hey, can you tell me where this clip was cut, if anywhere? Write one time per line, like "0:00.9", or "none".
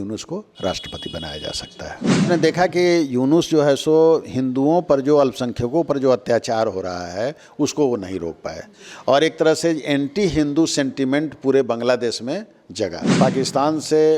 0:02.2
0:13.2